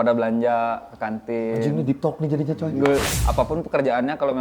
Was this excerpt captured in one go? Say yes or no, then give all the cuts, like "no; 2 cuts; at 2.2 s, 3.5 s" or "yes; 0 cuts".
no; 1 cut; at 3.1 s